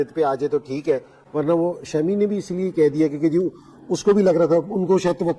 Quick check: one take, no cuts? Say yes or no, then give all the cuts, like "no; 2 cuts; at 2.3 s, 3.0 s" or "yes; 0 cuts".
yes; 0 cuts